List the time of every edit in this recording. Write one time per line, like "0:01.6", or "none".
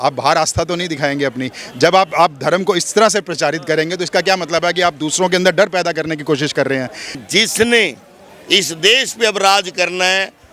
0:07.2